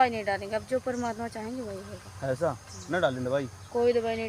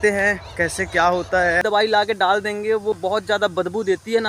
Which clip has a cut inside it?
second; 1 cut; at 1.6 s

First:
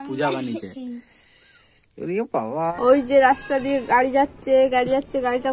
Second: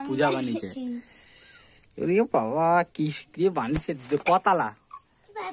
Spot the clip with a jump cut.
first; 1 cut; at 2.7 s

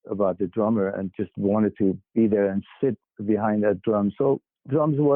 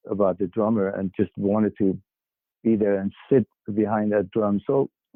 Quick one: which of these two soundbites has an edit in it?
first; 1 cut; at 2.0 s

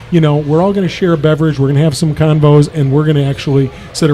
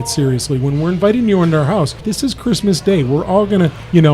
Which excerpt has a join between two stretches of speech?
second; 1 cut; at 2.0 s

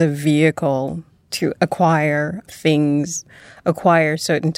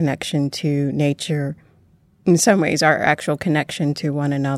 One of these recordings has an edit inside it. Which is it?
first; 1 cut; at 3.3 s

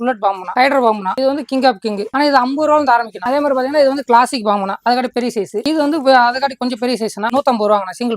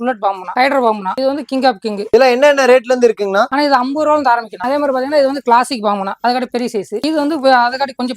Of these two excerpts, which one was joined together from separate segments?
first; 2 cuts; at 2.1 s, 7.3 s

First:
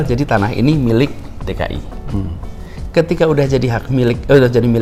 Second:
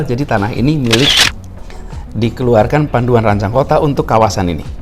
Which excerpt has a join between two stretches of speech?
second; 1 cut; at 1.3 s

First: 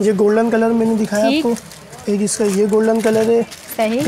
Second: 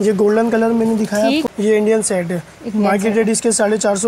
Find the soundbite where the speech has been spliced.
second; 1 cut; at 1.5 s

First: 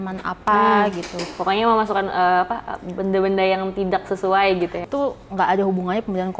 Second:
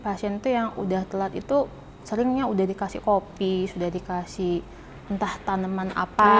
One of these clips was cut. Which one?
first; 1 cut; at 4.8 s

